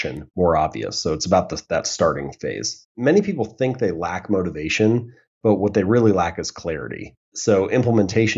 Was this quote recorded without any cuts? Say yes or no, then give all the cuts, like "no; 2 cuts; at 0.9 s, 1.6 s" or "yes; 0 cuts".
no; 2 cuts; at 2.9 s, 7.3 s